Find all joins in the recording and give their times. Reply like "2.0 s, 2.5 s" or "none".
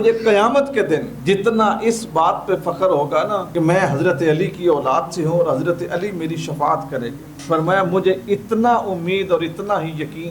1.1 s, 3.5 s